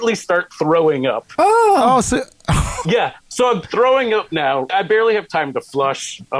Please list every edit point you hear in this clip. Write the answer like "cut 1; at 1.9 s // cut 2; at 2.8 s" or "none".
cut 1; at 1.2 s // cut 2; at 2.8 s // cut 3; at 4.7 s